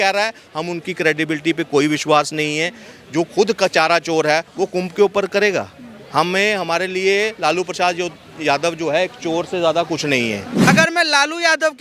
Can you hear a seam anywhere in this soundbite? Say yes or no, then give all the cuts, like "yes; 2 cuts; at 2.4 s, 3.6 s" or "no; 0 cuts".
yes; 1 cut; at 10.7 s